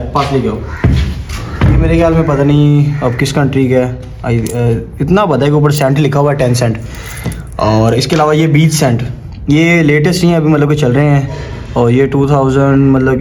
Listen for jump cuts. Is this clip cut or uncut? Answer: uncut